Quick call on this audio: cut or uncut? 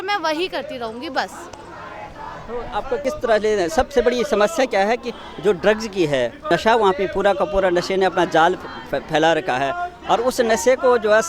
uncut